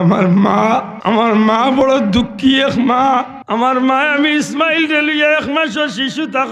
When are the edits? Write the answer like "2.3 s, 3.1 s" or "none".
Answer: 0.9 s, 3.4 s